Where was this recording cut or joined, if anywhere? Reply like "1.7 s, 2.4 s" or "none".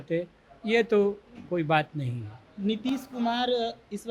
none